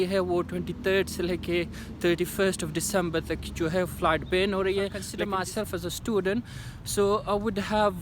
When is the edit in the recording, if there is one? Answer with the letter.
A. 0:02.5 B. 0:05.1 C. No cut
B